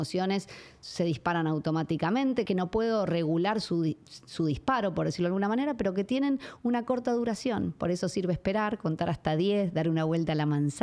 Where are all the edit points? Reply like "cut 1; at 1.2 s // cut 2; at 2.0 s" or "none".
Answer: none